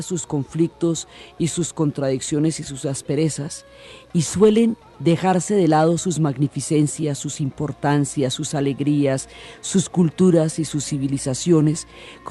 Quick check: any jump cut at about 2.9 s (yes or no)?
yes